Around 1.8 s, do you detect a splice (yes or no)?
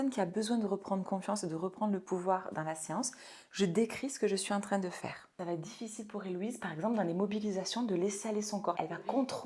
no